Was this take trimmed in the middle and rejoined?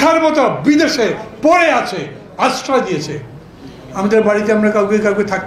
no; 0 cuts

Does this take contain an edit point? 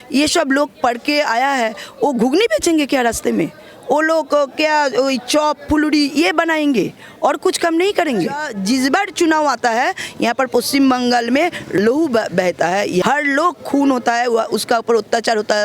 yes; 3 cuts; at 8.5 s, 11.7 s, 13.0 s

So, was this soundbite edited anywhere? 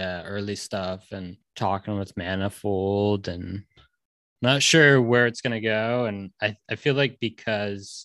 yes; 1 cut; at 1.4 s

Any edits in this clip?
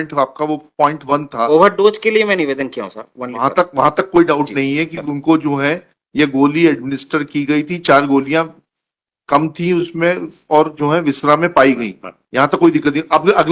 no; 0 cuts

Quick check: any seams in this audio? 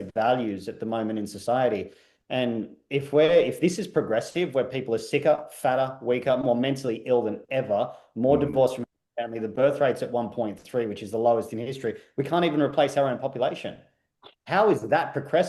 no; 0 cuts

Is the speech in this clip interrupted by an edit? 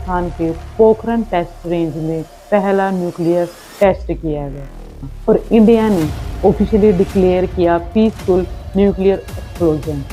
yes; 1 cut; at 5.0 s

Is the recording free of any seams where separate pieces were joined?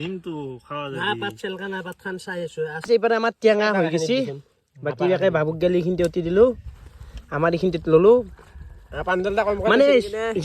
no; 1 cut; at 2.8 s

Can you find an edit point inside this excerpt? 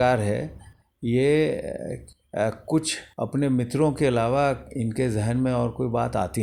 no; 0 cuts

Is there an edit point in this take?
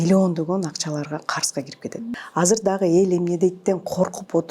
yes; 1 cut; at 1.9 s

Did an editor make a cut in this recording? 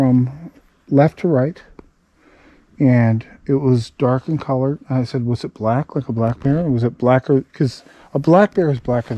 no; 0 cuts

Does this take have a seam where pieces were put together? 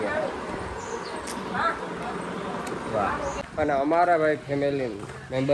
yes; 1 cut; at 3.4 s

